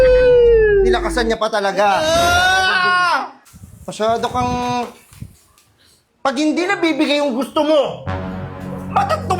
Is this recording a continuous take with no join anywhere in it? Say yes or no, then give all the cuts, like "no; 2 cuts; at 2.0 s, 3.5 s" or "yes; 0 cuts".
no; 1 cut; at 3.3 s